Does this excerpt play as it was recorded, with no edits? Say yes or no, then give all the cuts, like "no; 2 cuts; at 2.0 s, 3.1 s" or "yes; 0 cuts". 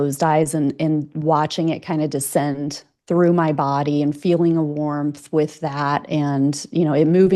yes; 0 cuts